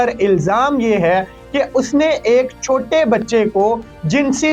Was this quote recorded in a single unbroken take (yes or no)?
yes